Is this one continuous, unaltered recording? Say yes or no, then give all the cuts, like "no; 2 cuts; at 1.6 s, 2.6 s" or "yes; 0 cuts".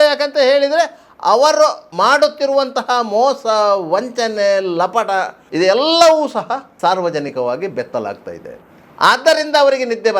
no; 3 cuts; at 1.8 s, 5.4 s, 6.7 s